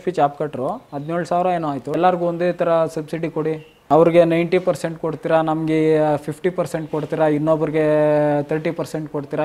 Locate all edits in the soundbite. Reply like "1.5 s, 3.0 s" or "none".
2.0 s, 3.7 s